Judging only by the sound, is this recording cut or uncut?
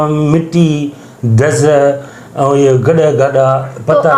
uncut